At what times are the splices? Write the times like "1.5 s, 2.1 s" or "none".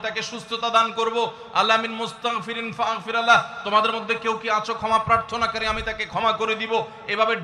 none